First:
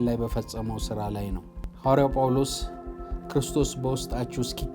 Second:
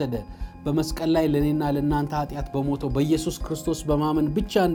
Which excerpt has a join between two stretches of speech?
first; 1 cut; at 1.6 s

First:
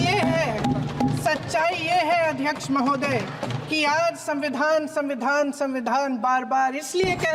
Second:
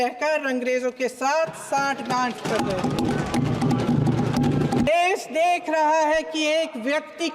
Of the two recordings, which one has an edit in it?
second; 1 cut; at 4.9 s

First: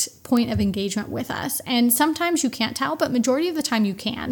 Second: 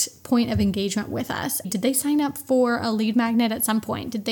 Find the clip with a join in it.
second; 1 cut; at 1.7 s

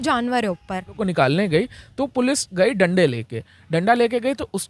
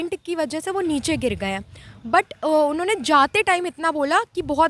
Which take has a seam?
first; 1 cut; at 1.0 s

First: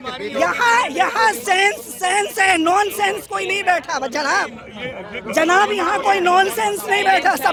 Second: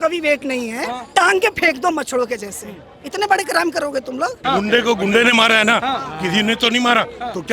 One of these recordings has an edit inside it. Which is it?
second; 1 cut; at 4.4 s

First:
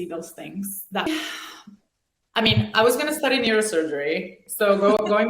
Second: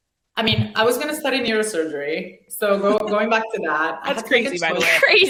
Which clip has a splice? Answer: first; 1 cut; at 1.1 s

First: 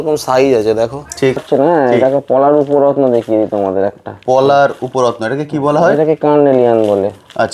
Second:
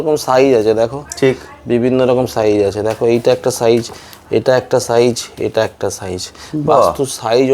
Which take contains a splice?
first; 1 cut; at 1.4 s

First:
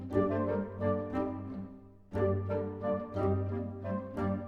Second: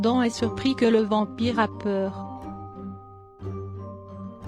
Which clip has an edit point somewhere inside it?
second; 1 cut; at 2.1 s

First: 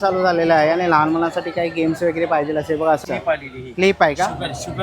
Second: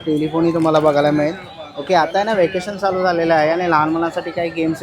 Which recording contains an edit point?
first; 1 cut; at 3.0 s

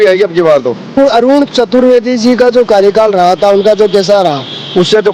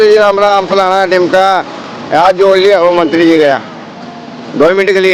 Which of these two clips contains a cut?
first; 1 cut; at 0.9 s

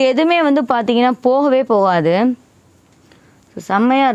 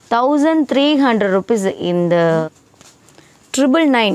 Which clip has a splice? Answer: second; 1 cut; at 2.6 s

